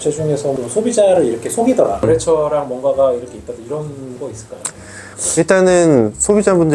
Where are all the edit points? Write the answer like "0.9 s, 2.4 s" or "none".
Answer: 2.0 s